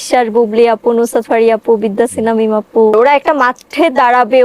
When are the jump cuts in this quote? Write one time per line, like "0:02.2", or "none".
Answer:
0:02.9